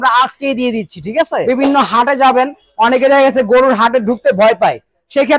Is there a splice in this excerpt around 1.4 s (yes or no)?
yes